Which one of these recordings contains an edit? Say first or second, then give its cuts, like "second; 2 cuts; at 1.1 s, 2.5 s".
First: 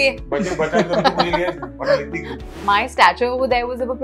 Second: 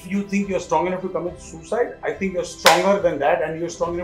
first; 1 cut; at 2.6 s